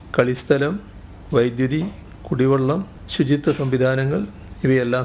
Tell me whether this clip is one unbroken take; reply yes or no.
no